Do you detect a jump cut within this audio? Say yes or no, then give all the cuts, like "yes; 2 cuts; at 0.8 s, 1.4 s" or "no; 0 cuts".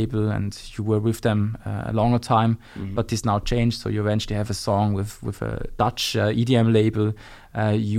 no; 0 cuts